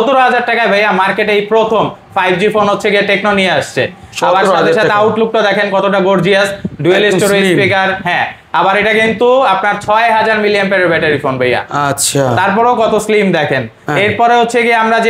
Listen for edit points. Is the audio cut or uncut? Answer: uncut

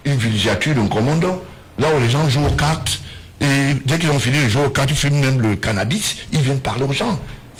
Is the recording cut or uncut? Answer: uncut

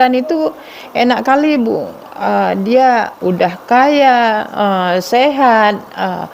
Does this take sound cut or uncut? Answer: cut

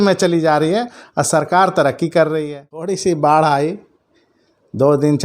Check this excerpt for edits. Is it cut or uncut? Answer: cut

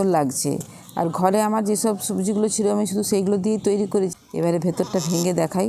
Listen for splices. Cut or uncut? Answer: cut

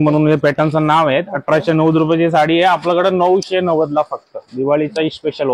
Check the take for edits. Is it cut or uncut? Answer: uncut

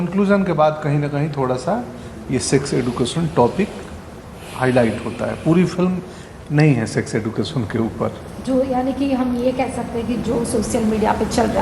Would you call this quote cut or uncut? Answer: uncut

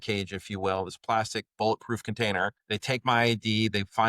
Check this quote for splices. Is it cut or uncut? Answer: cut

